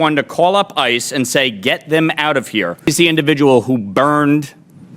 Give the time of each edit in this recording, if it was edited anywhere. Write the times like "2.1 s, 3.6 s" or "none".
2.9 s